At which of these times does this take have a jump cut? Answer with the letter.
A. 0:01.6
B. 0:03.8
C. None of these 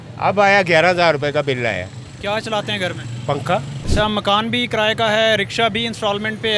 B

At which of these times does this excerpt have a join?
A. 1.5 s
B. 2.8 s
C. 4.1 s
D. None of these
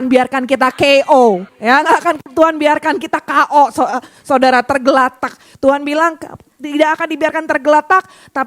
A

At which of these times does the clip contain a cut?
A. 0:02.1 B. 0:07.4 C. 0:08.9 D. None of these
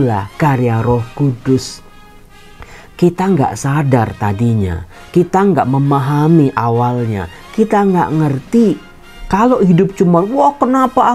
D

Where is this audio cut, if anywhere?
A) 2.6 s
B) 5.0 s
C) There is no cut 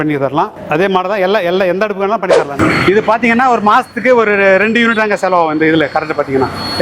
A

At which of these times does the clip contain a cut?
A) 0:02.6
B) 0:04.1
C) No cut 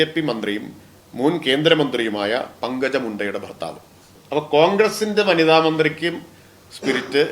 B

